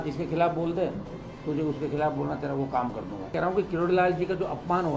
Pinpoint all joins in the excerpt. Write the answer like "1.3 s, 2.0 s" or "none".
3.3 s

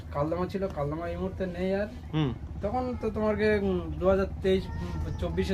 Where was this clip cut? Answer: none

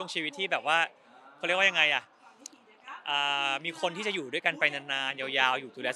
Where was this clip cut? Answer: none

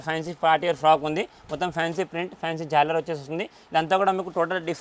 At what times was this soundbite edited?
none

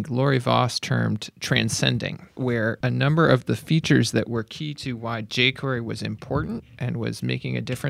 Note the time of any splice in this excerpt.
1.3 s, 2.7 s

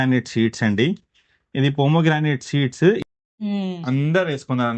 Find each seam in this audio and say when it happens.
3.0 s

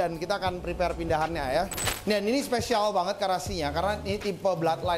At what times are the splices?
1.9 s

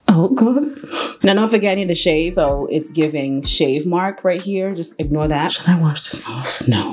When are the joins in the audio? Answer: none

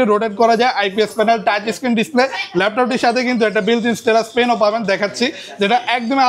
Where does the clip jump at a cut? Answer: none

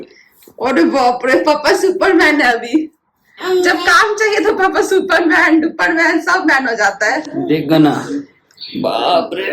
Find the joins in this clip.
7.3 s

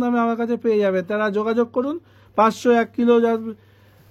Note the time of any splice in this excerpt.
none

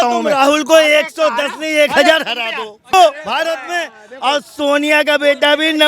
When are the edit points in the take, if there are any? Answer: 2.9 s

